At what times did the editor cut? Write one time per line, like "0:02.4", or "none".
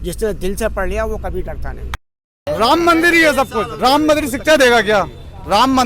0:02.4